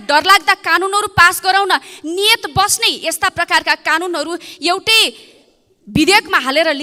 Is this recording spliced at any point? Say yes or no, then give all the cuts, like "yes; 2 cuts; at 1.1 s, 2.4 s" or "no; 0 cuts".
no; 0 cuts